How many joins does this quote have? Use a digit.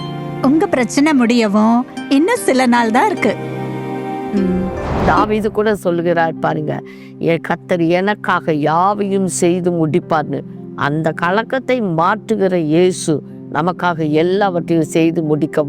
1